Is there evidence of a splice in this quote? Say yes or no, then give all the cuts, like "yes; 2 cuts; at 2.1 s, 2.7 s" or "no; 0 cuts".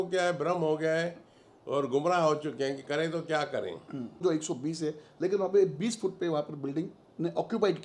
yes; 1 cut; at 4.2 s